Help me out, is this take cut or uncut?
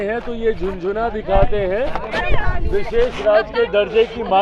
uncut